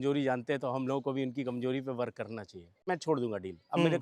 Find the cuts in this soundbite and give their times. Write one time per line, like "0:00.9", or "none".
0:02.9